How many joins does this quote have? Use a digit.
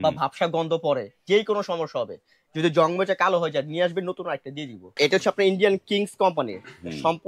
1